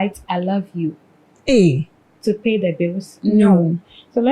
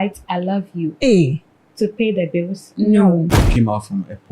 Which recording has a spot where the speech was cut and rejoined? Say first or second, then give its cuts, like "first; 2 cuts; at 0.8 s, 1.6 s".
second; 2 cuts; at 0.9 s, 3.4 s